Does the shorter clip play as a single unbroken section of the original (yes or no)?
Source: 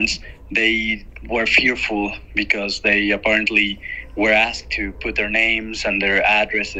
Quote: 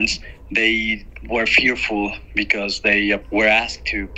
no